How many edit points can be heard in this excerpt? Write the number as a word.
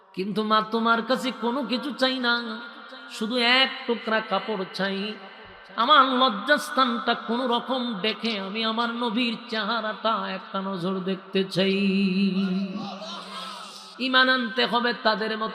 one